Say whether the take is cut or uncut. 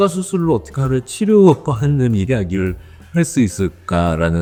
uncut